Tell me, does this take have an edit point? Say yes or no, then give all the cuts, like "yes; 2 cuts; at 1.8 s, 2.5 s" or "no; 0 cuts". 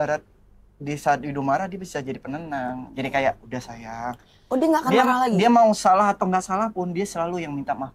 no; 0 cuts